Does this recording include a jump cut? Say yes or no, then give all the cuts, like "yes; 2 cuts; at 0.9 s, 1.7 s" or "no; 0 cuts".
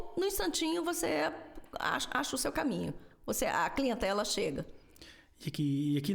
no; 0 cuts